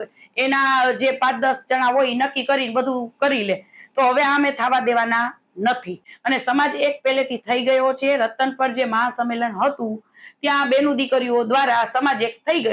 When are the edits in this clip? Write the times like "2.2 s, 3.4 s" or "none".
6.0 s